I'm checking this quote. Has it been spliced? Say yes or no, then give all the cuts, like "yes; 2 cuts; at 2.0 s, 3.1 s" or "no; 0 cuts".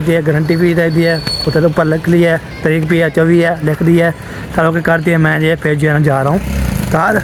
no; 0 cuts